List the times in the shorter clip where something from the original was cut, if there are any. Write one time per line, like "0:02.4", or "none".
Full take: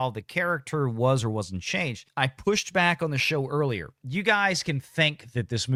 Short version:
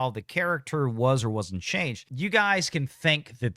0:02.0